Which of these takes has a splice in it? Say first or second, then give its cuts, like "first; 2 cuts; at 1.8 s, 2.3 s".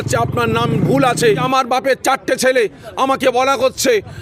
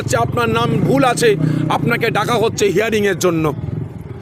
first; 1 cut; at 1.4 s